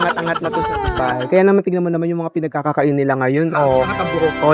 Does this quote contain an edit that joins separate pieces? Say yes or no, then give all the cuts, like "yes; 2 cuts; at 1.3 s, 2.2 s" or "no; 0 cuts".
no; 0 cuts